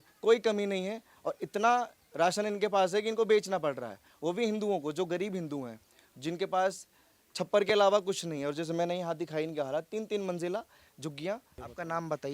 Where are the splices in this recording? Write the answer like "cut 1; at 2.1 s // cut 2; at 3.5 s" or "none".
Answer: none

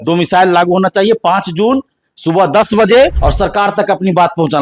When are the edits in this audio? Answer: cut 1; at 3.2 s

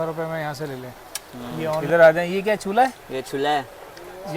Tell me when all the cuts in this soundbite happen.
cut 1; at 1.8 s

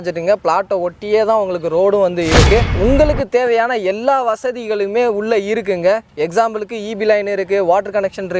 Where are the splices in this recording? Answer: cut 1; at 2.7 s

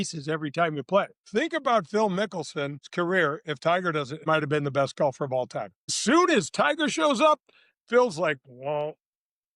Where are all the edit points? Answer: cut 1; at 1.2 s // cut 2; at 2.8 s // cut 3; at 4.2 s // cut 4; at 6.0 s

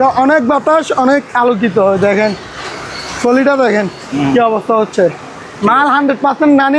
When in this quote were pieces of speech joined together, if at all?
none

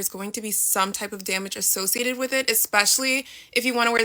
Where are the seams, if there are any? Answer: none

